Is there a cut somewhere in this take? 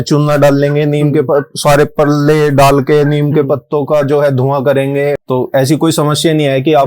yes; 1 cut; at 5.2 s

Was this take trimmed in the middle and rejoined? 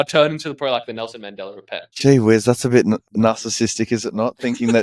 yes; 2 cuts; at 1.9 s, 3.1 s

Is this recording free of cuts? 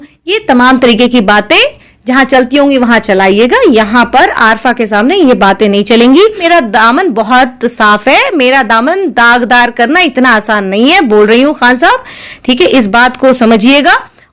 yes; 0 cuts

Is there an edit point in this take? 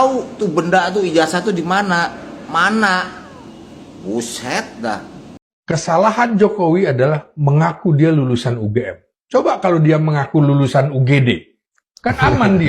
yes; 1 cut; at 5.3 s

